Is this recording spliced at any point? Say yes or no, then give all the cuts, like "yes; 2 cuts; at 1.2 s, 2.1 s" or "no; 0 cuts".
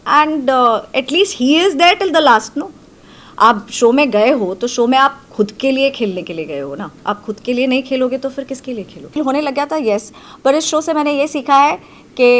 yes; 1 cut; at 9.1 s